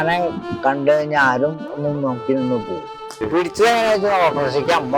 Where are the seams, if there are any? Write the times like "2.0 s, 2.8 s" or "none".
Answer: 3.2 s